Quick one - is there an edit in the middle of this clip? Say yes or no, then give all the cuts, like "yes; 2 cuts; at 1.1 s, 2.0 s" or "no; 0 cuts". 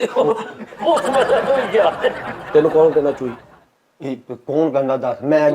no; 0 cuts